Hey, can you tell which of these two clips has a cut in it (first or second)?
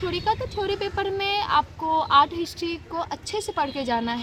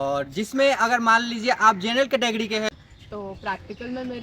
second